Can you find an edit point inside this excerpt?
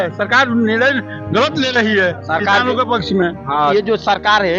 no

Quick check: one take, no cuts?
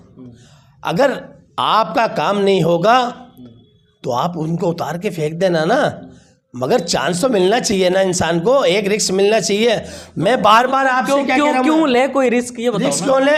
yes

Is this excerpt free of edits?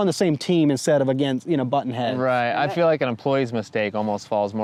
yes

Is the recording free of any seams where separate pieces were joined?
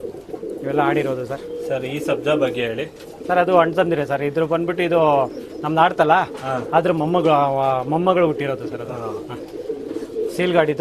yes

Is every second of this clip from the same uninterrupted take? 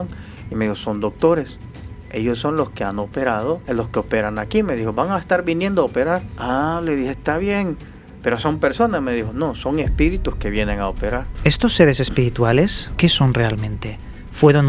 no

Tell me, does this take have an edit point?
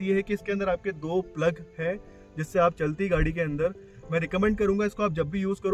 no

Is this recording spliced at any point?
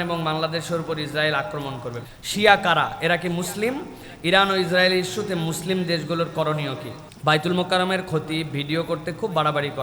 yes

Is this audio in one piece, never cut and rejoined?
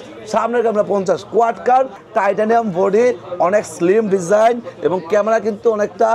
no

